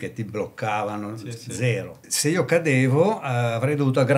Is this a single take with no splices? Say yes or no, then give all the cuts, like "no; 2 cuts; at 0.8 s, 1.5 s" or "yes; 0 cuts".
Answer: no; 1 cut; at 2.0 s